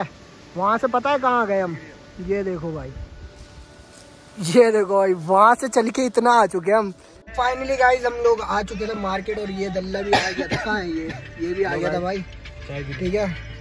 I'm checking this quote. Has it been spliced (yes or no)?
yes